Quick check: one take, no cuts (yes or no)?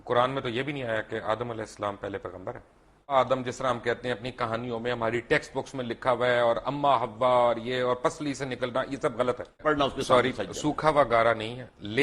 no